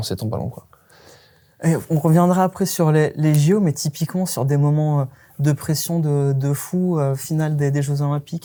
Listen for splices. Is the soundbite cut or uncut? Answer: uncut